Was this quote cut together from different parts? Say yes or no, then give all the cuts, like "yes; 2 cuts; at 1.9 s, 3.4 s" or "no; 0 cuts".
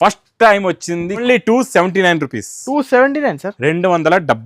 yes; 1 cut; at 1.2 s